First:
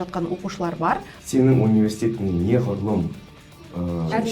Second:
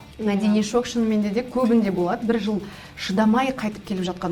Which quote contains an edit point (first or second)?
first